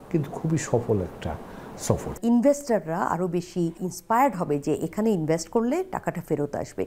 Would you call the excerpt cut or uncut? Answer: cut